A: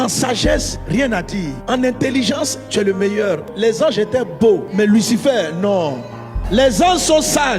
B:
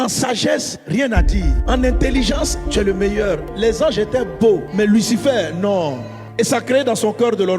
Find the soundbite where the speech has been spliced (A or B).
B